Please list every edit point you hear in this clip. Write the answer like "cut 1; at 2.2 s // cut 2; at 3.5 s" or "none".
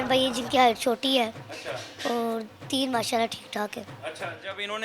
none